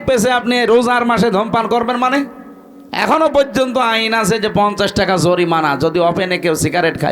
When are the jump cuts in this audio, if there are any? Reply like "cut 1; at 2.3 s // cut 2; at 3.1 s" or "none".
none